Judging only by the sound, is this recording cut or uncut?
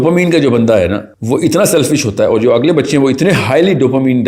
cut